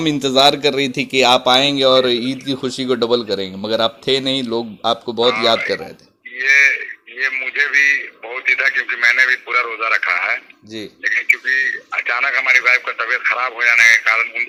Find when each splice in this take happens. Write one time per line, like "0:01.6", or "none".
none